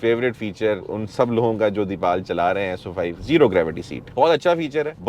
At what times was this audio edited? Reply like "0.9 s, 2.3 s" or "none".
0.9 s, 3.2 s